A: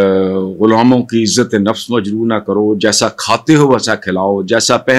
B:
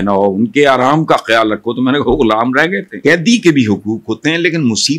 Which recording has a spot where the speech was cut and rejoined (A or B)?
B